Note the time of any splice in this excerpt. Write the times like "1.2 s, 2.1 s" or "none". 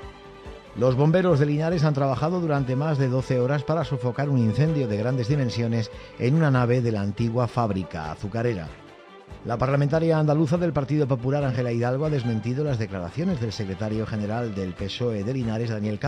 none